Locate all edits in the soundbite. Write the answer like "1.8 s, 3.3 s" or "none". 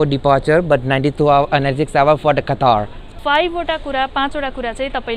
3.1 s